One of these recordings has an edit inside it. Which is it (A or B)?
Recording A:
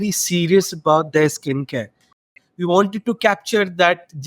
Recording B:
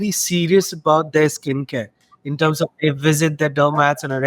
A